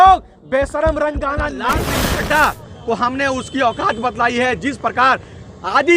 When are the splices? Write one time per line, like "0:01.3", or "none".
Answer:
0:01.7

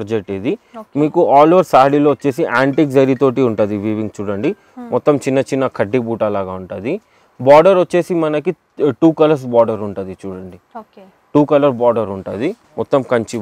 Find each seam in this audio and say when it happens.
none

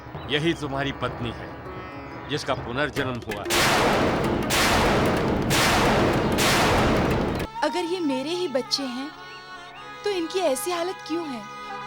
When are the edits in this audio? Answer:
0:07.5

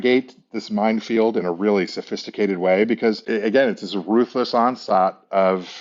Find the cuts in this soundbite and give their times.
none

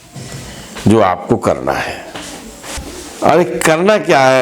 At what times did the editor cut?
0:02.7

